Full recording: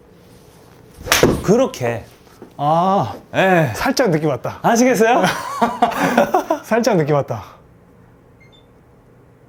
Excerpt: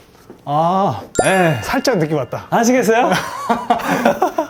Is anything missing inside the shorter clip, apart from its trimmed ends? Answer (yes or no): no